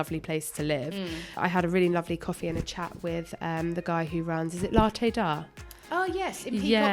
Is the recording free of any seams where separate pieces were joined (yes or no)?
no